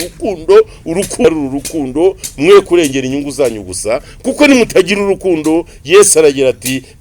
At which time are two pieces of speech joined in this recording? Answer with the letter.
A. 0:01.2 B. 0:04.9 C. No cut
A